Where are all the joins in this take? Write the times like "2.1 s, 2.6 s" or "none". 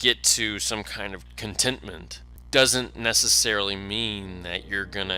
1.3 s